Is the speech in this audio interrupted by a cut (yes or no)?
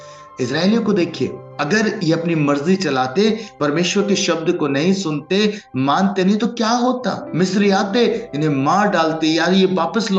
yes